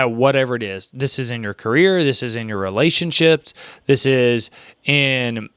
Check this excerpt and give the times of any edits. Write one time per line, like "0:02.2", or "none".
none